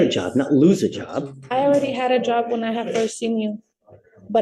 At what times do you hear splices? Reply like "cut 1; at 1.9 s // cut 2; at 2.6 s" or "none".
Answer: none